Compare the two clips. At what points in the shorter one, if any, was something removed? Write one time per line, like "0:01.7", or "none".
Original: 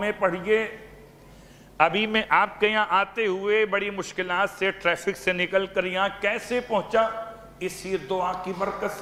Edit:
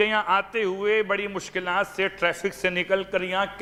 none